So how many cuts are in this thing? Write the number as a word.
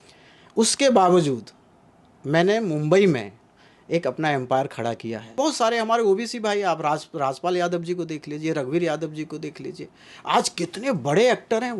one